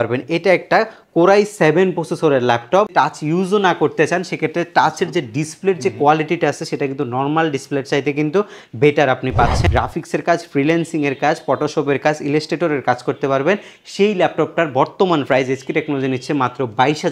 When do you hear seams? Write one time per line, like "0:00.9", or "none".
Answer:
0:02.9
0:09.7